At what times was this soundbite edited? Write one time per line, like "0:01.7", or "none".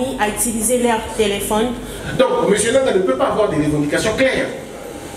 0:02.0